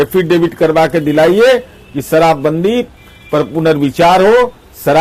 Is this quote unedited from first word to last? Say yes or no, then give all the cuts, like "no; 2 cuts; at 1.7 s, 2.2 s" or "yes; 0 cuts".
yes; 0 cuts